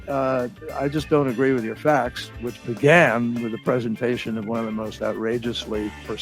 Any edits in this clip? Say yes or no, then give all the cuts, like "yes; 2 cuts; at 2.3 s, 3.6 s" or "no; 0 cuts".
yes; 1 cut; at 2.2 s